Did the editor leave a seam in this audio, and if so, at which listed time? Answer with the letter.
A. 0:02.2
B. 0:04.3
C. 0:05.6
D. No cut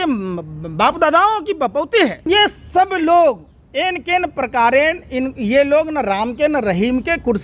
A